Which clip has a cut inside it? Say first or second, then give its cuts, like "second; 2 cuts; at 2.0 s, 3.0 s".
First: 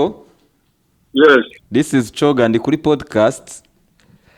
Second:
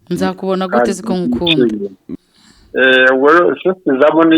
second; 1 cut; at 2.0 s